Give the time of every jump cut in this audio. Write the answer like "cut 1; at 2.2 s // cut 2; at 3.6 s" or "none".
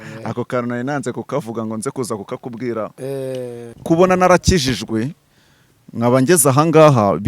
cut 1; at 3.8 s